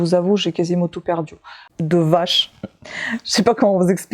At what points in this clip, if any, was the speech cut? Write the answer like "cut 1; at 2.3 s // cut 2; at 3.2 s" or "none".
cut 1; at 1.7 s